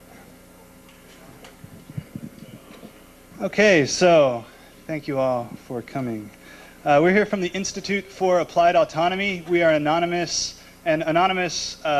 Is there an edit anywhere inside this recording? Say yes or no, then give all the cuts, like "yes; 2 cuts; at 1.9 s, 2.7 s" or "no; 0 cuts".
no; 0 cuts